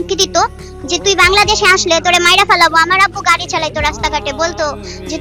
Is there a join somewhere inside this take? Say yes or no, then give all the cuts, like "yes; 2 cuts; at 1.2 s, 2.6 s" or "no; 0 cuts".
no; 0 cuts